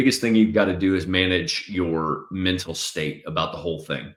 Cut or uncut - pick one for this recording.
uncut